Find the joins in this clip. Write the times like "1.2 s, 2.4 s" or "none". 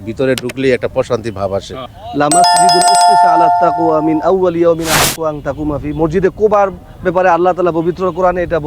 1.9 s, 3.8 s